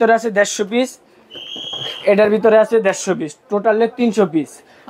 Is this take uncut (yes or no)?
yes